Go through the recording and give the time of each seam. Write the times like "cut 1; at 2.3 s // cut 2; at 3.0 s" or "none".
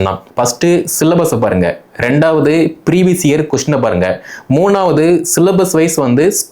none